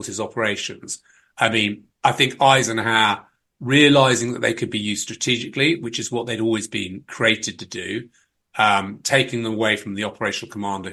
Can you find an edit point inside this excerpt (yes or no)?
no